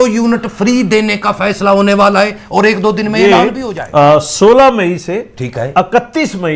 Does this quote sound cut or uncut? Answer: cut